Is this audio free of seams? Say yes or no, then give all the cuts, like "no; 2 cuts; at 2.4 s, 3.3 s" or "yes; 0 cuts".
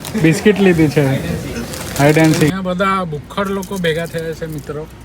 no; 1 cut; at 2.5 s